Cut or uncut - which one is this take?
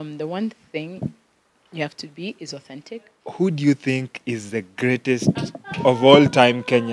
cut